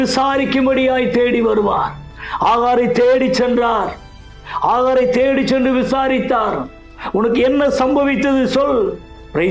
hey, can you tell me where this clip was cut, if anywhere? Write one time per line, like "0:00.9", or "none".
none